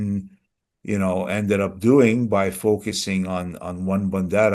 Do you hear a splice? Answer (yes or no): no